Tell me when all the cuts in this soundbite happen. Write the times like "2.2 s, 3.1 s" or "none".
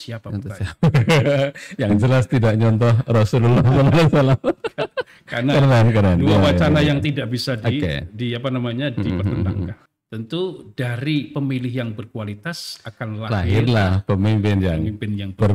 9.8 s